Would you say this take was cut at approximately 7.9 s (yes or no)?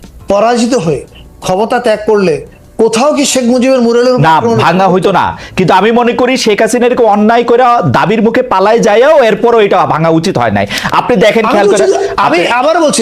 no